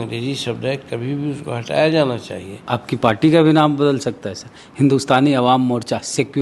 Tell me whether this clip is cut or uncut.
cut